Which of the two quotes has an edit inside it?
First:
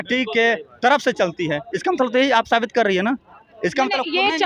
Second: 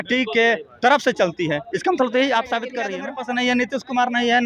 second; 1 cut; at 2.8 s

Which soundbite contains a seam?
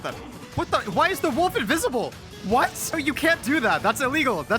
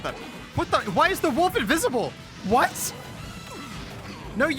first; 1 cut; at 3.0 s

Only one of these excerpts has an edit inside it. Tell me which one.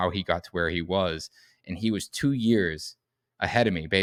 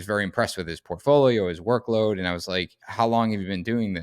second; 1 cut; at 2.8 s

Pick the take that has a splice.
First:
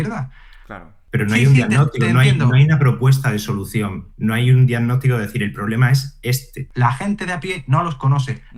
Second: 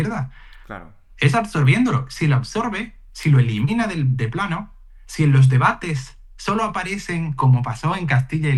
first; 2 cuts; at 0.9 s, 6.6 s

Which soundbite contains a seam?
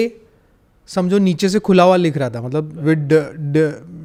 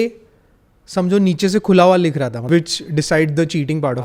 second; 1 cut; at 2.4 s

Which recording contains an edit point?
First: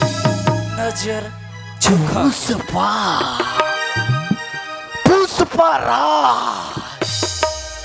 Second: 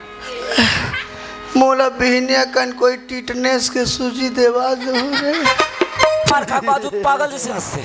second; 1 cut; at 6.3 s

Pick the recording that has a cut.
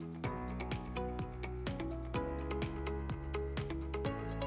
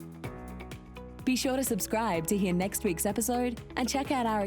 second; 1 cut; at 1.1 s

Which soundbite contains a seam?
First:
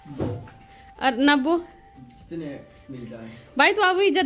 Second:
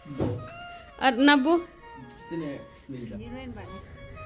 second; 1 cut; at 3.1 s

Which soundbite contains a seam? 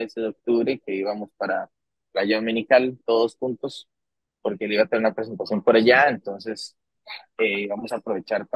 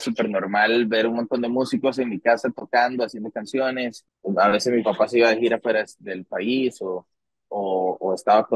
second; 1 cut; at 4.1 s

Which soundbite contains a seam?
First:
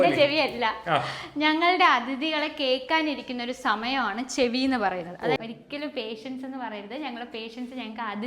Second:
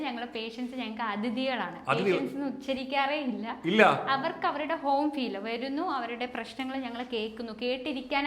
first; 1 cut; at 5.4 s

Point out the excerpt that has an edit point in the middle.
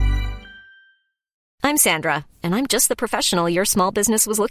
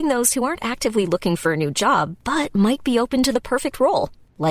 first; 1 cut; at 1.4 s

